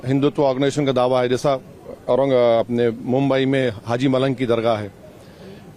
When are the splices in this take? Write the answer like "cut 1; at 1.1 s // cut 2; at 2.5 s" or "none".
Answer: none